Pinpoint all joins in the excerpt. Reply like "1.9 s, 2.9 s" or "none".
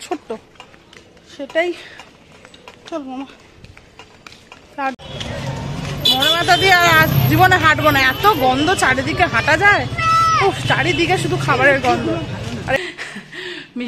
5.0 s, 12.8 s